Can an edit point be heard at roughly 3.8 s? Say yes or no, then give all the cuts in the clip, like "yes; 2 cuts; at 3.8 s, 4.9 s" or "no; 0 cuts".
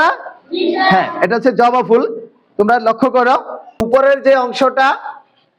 yes; 1 cut; at 3.8 s